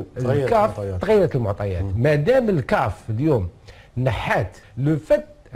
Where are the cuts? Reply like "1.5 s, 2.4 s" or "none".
4.6 s